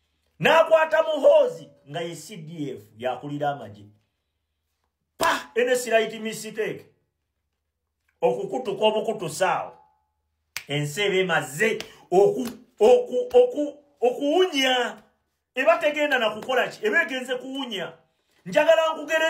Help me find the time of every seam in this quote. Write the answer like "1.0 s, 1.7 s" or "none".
8.8 s